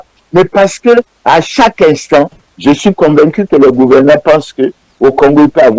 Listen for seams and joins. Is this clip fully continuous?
no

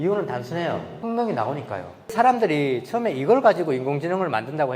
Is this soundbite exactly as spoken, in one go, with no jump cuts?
no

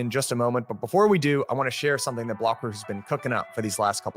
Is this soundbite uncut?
yes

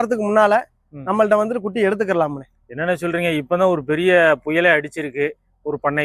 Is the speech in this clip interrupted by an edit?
no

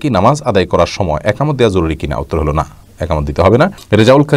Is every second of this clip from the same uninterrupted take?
yes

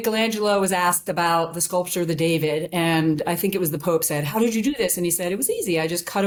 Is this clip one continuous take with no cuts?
yes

